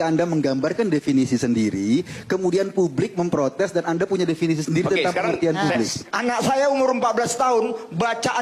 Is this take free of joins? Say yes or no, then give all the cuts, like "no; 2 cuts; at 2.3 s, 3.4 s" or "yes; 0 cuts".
no; 1 cut; at 6.0 s